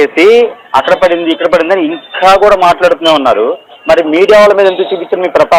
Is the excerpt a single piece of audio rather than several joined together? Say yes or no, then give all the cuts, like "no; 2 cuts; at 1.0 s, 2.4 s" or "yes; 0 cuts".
yes; 0 cuts